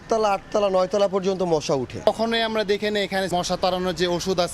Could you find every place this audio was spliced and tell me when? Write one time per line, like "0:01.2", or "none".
0:02.1
0:03.3